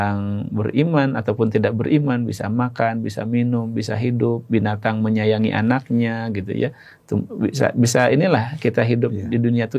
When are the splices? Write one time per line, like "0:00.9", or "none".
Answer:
none